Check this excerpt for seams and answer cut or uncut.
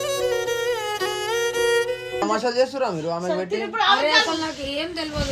cut